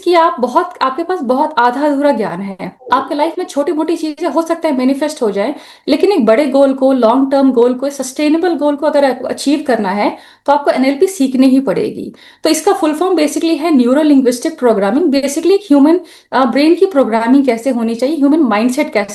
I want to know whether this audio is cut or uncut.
uncut